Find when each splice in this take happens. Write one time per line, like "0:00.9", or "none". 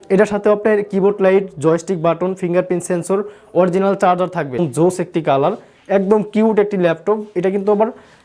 0:04.6